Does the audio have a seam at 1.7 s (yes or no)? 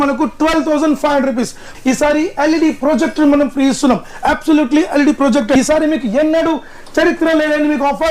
yes